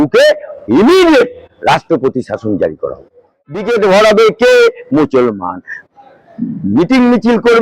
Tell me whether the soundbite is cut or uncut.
cut